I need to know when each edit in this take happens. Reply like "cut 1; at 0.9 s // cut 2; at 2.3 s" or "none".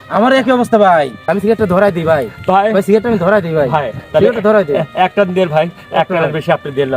cut 1; at 1.3 s